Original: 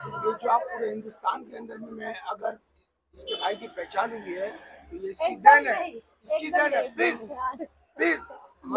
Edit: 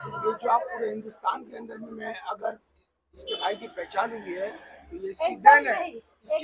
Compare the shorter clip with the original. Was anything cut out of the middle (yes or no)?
no